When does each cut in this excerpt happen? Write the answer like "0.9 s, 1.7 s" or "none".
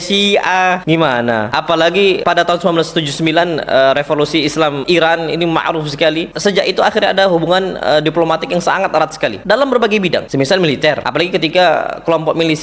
1.5 s, 2.2 s, 4.8 s, 6.3 s, 9.4 s, 10.3 s, 11.0 s